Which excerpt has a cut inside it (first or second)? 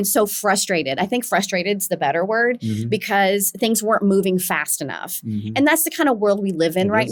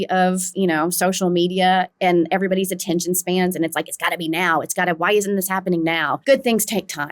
second